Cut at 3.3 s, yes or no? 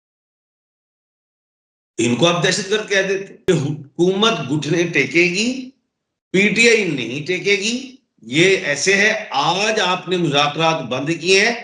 yes